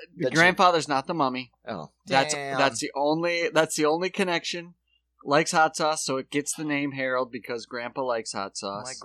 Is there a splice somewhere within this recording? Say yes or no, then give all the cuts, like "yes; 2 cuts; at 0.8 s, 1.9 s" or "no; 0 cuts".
no; 0 cuts